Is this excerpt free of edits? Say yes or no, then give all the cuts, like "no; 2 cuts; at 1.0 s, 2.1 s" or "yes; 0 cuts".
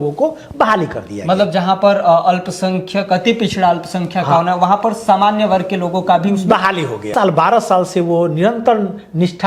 no; 1 cut; at 7.1 s